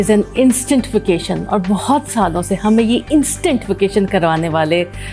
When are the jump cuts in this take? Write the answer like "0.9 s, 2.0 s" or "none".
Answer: none